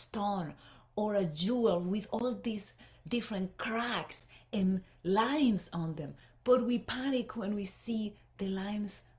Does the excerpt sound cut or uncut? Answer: uncut